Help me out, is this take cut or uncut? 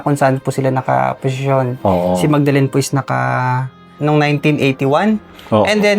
cut